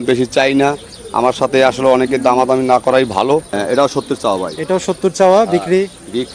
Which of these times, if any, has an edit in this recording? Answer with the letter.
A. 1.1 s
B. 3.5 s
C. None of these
B